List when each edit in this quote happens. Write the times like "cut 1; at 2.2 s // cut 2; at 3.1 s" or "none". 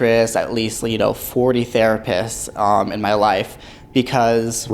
none